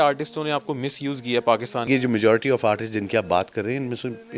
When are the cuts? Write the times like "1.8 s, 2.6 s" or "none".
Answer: 1.8 s